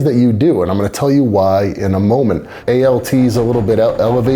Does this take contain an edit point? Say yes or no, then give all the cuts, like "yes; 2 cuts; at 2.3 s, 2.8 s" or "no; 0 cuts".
yes; 1 cut; at 2.5 s